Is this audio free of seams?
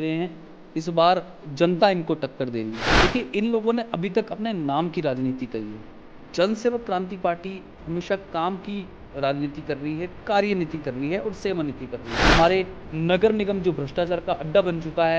no; 2 cuts; at 2.8 s, 12.1 s

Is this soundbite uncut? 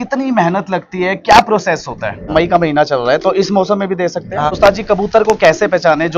no; 2 cuts; at 2.3 s, 4.6 s

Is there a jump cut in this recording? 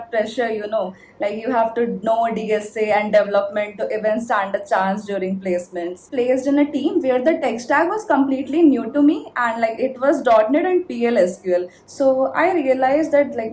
yes; 2 cuts; at 6.1 s, 11.8 s

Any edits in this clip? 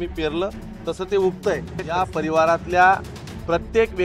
yes; 1 cut; at 1.8 s

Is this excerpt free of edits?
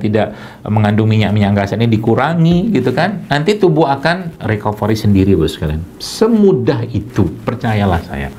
yes; 0 cuts

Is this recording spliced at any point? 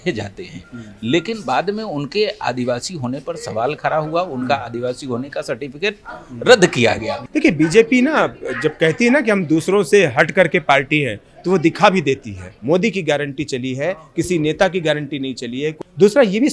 yes; 3 cuts; at 7.2 s, 12.5 s, 15.7 s

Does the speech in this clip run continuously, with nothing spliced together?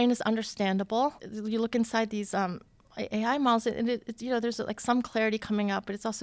no; 1 cut; at 1.3 s

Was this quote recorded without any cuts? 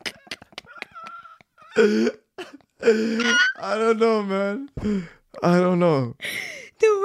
yes; 0 cuts

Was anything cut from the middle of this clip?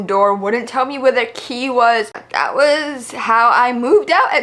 yes; 1 cut; at 2.2 s

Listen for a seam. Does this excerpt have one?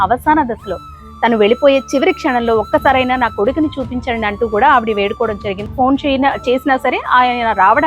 yes; 1 cut; at 5.5 s

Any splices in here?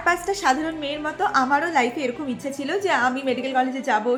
no; 0 cuts

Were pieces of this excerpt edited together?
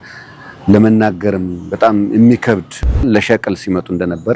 yes; 1 cut; at 3.0 s

